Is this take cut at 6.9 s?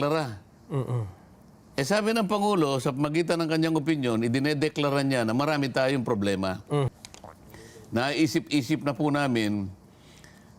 yes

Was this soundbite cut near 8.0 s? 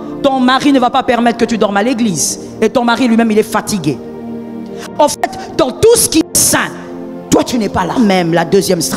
yes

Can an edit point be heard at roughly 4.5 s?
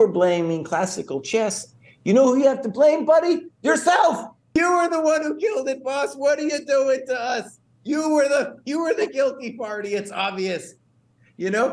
yes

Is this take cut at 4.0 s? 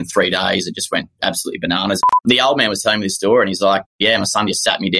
yes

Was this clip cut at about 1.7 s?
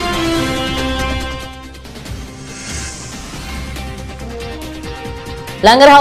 no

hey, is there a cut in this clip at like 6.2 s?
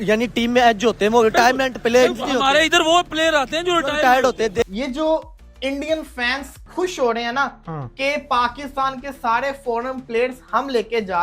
no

